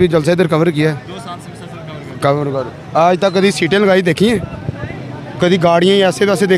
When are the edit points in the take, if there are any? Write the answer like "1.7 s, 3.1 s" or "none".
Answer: none